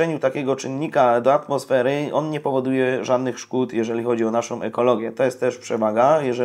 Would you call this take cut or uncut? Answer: uncut